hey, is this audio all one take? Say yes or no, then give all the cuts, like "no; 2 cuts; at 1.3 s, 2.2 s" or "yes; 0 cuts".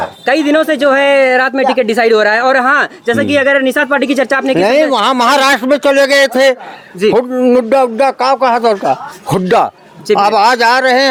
yes; 0 cuts